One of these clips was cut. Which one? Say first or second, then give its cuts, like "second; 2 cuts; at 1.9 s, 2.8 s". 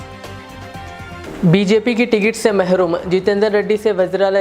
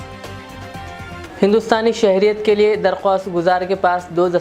first; 1 cut; at 1.2 s